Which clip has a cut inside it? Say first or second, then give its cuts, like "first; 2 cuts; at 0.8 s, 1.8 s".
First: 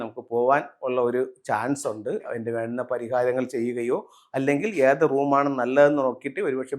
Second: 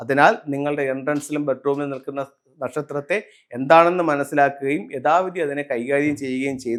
first; 1 cut; at 2.2 s